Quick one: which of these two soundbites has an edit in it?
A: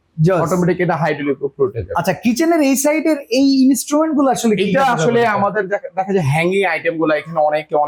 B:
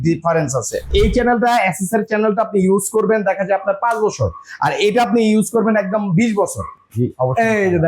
B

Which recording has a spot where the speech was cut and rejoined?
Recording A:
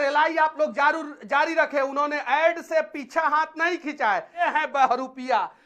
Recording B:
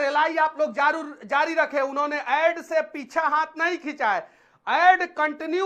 A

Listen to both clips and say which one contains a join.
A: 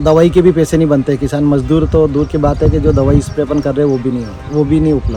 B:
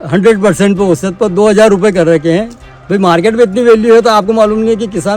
B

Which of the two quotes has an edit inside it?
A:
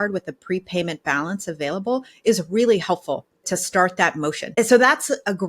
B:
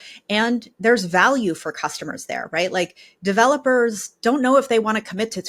A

